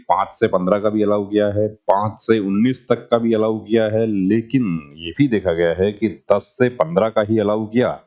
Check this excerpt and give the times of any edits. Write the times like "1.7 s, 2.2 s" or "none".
none

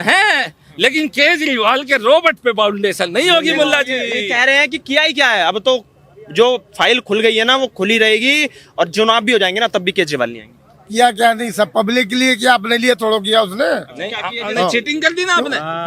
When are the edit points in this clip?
none

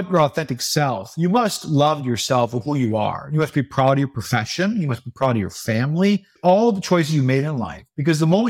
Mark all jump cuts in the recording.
none

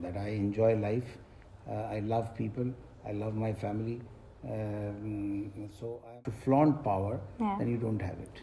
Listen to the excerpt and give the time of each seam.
6.1 s

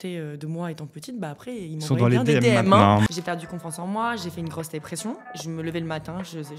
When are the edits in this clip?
3.1 s, 5.3 s

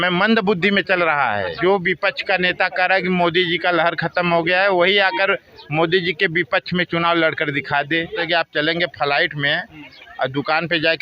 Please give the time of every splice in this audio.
1.5 s, 8.2 s

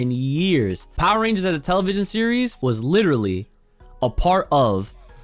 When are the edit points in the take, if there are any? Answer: 0.8 s, 2.5 s

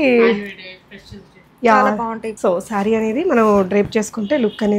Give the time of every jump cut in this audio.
2.3 s

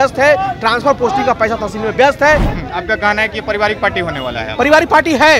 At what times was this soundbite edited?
2.5 s

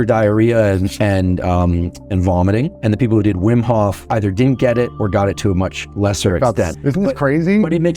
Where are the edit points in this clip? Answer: 6.7 s

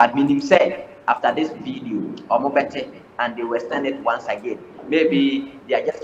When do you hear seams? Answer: none

